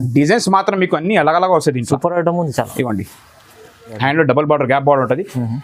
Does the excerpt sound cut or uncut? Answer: cut